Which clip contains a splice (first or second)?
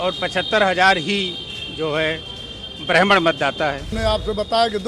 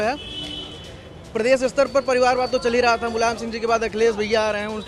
first